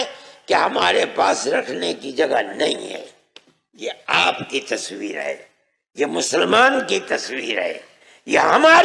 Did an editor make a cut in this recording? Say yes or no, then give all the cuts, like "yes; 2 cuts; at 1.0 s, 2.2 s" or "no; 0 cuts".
no; 0 cuts